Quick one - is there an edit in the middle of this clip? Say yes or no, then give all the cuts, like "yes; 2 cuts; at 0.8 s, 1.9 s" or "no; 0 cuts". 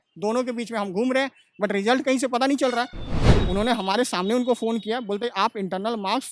yes; 1 cut; at 3.1 s